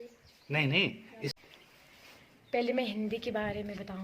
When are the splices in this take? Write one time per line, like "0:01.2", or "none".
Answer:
0:01.3